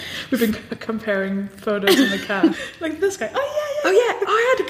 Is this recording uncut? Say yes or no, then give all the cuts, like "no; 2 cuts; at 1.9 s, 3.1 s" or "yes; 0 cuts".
no; 1 cut; at 2.6 s